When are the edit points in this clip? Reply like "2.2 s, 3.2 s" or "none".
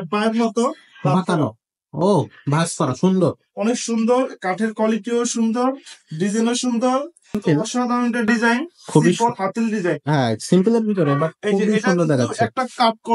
7.4 s